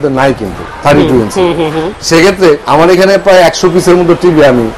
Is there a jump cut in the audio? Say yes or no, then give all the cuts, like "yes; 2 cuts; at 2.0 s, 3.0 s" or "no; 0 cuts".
yes; 1 cut; at 2.6 s